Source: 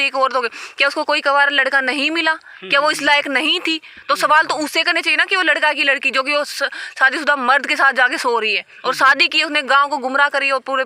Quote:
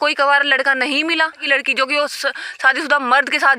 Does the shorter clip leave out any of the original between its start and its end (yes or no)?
yes